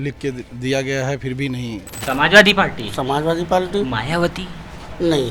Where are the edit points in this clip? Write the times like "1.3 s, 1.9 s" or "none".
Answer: 2.0 s